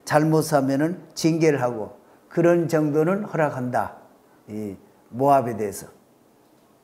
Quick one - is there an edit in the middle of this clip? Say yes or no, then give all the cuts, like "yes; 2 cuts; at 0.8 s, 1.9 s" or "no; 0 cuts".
no; 0 cuts